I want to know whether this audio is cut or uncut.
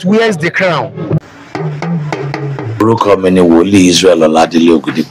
cut